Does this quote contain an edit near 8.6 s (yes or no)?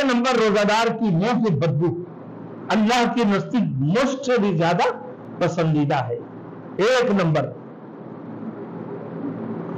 no